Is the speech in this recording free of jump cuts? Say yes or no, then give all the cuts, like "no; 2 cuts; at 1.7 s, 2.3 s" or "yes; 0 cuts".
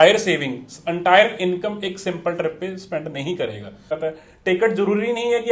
no; 1 cut; at 4.0 s